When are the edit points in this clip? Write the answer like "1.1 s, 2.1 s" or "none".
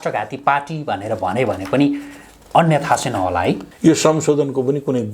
3.7 s